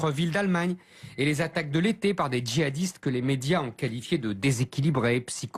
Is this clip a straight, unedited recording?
no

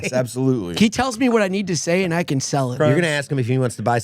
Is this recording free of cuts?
no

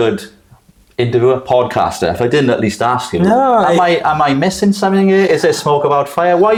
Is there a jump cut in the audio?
no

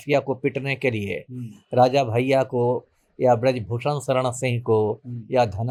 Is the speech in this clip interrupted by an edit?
no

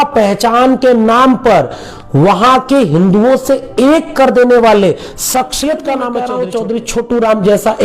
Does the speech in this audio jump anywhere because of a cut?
yes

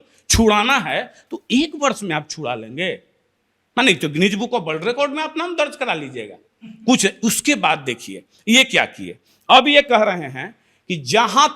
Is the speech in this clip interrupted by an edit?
no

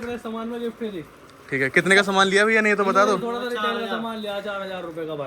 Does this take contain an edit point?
no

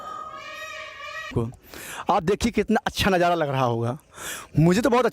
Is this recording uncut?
no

